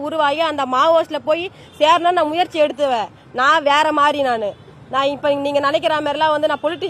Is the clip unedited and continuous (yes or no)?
yes